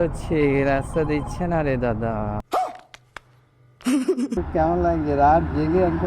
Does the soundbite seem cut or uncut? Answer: cut